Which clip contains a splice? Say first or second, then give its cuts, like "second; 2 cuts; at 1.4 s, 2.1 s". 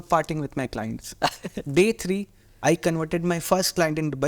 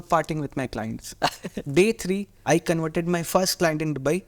second; 1 cut; at 2.3 s